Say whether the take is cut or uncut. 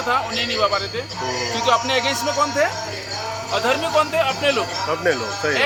uncut